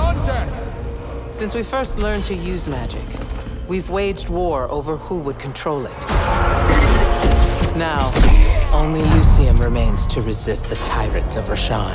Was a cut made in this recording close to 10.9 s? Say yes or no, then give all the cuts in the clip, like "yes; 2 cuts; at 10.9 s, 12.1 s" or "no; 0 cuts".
no; 0 cuts